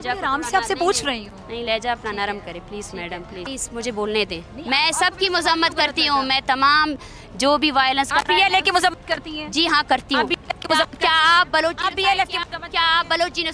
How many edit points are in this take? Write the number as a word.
one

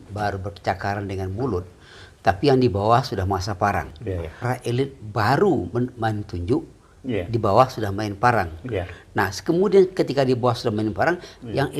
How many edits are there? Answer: one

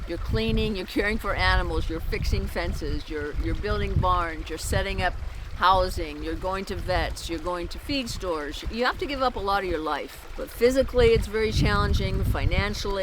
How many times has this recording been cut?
two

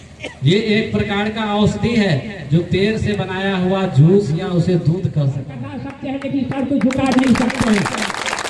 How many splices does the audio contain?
one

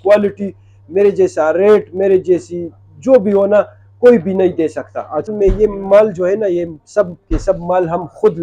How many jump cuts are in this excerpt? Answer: one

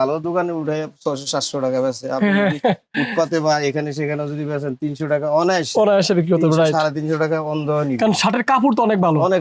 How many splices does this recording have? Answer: zero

